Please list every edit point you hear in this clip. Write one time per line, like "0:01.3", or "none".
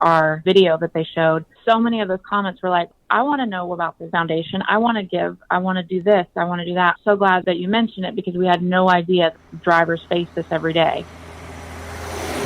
0:11.1